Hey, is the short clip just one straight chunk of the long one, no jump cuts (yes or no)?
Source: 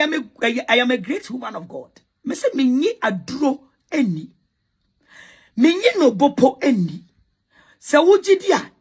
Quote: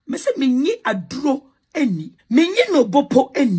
no